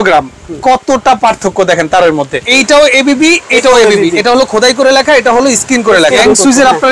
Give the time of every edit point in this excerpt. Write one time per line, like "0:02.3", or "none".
0:02.4
0:06.2